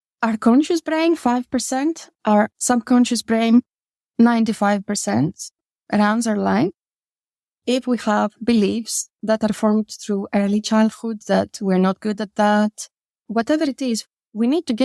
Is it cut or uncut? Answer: cut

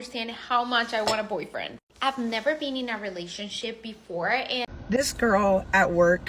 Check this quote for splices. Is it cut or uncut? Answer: cut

